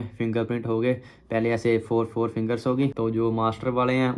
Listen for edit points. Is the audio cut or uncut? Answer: cut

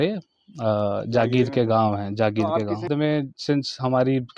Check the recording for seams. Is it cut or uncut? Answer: cut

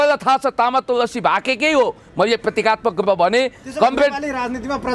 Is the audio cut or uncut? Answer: uncut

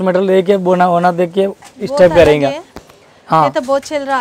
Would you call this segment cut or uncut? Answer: uncut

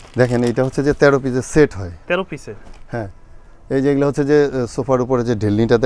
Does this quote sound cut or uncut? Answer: uncut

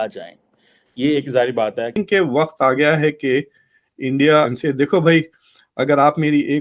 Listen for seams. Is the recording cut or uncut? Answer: cut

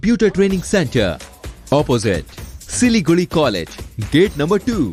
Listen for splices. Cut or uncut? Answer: uncut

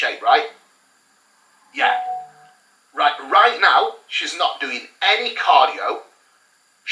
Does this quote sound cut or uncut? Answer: uncut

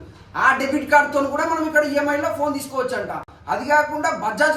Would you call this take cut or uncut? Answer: uncut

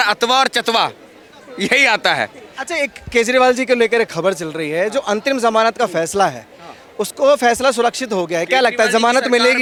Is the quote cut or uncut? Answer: uncut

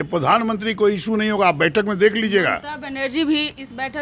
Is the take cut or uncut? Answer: uncut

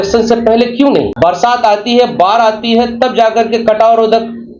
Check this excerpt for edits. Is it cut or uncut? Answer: cut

